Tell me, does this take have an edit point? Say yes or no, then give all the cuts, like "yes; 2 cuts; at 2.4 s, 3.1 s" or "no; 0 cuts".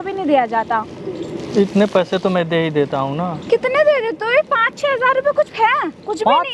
no; 0 cuts